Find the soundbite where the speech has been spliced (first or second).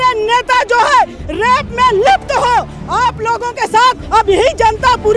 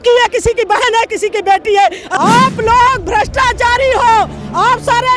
second